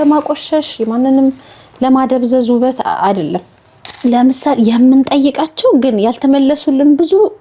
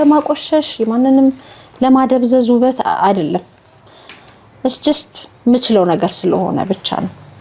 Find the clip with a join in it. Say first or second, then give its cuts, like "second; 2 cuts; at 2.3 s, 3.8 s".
first; 1 cut; at 3.8 s